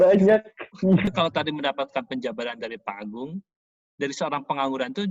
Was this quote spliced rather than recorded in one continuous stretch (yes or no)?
yes